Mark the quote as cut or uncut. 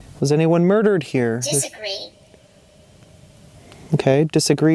uncut